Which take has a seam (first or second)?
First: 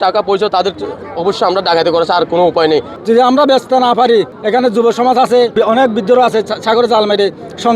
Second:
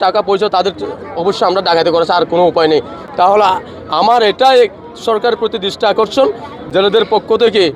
first